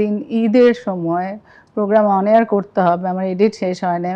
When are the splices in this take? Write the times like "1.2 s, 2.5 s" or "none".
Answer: none